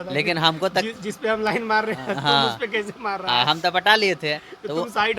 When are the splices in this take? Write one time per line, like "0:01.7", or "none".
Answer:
none